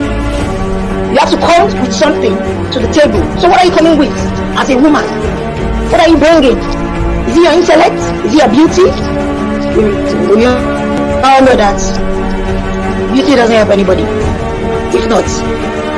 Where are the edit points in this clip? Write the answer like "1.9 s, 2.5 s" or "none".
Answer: 1.1 s